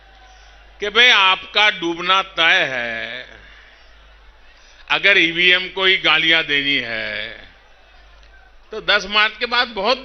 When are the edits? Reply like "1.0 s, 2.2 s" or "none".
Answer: none